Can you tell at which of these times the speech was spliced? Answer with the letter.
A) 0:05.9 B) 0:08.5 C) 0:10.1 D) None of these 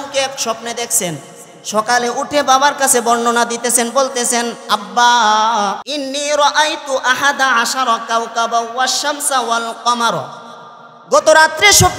A